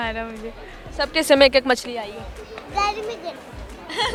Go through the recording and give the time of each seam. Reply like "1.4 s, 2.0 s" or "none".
none